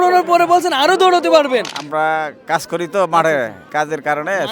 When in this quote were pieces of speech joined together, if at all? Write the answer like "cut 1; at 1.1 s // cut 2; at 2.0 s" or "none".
cut 1; at 1.8 s // cut 2; at 3.6 s